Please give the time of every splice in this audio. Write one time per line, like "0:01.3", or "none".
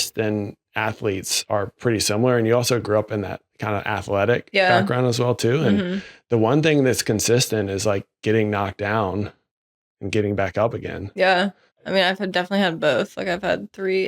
0:01.8